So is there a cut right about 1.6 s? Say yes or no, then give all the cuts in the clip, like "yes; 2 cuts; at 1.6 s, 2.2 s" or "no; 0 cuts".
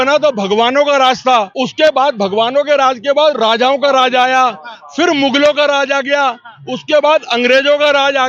yes; 1 cut; at 1.6 s